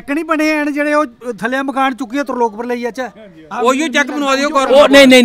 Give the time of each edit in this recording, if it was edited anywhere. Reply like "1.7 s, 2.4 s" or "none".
none